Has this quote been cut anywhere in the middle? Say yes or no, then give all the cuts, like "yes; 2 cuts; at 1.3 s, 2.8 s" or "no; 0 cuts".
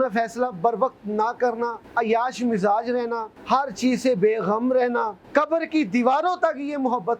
yes; 3 cuts; at 1.8 s, 3.3 s, 5.2 s